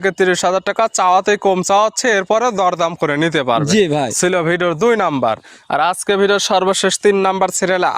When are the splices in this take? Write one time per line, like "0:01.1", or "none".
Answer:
none